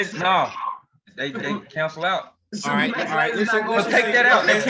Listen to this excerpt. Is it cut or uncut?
uncut